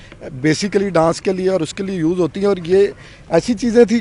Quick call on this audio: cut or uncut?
uncut